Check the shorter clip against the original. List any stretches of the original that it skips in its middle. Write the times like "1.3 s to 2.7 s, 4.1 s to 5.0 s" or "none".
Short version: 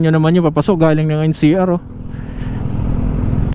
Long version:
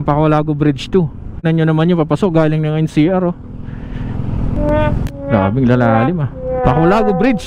none